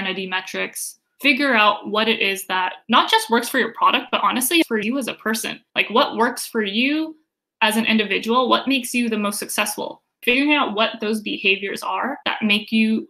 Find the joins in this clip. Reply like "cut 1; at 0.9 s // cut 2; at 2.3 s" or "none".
cut 1; at 10.1 s